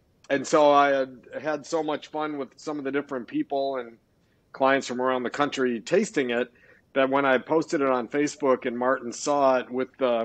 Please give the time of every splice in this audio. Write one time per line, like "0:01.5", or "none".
none